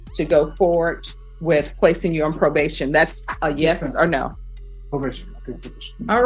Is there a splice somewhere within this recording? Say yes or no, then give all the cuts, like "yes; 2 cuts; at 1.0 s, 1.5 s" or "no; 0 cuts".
no; 0 cuts